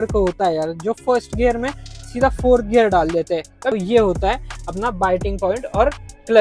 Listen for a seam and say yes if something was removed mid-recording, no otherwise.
yes